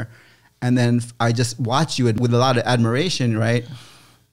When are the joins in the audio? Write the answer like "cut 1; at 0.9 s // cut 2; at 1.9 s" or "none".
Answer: cut 1; at 2.1 s

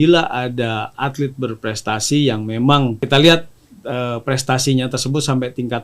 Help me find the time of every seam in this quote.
cut 1; at 3.0 s

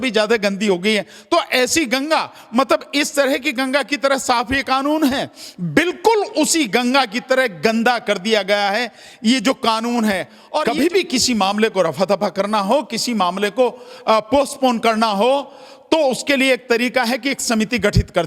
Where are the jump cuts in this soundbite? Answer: cut 1; at 10.6 s

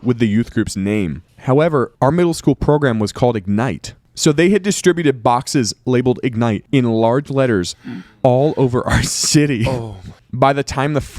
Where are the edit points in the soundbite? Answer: cut 1; at 1.9 s // cut 2; at 10.1 s

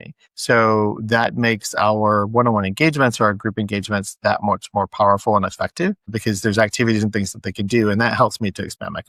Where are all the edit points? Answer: none

